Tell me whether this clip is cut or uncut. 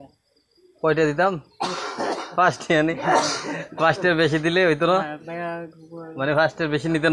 uncut